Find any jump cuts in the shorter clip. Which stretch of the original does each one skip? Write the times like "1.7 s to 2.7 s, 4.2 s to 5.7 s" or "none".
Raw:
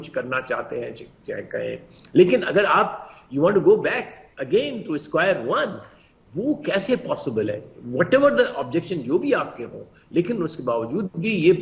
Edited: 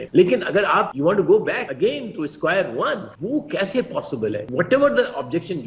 2.9 s to 3.3 s, 4.0 s to 4.4 s, 5.8 s to 6.3 s, 7.6 s to 7.9 s